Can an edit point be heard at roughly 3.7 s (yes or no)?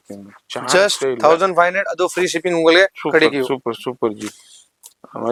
no